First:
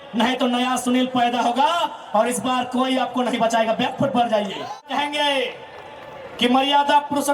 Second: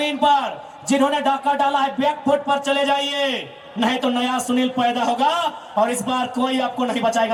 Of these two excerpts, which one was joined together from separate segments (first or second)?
first